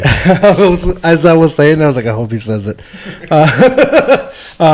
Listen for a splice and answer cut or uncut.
uncut